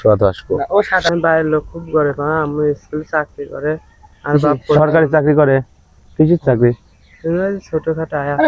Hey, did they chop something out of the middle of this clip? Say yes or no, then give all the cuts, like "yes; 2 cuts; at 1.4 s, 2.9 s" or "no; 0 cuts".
yes; 1 cut; at 1.1 s